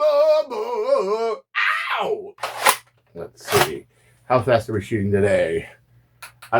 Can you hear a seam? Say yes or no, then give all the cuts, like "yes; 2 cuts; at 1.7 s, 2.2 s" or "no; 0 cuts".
yes; 1 cut; at 2.3 s